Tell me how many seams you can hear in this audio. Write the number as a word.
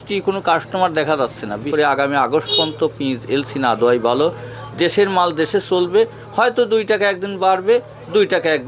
one